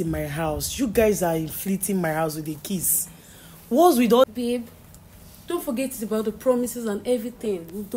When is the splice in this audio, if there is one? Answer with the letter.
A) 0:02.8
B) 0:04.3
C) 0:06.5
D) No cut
B